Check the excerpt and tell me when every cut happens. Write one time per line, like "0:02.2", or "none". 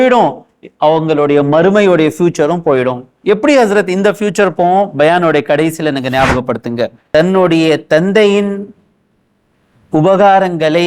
0:07.0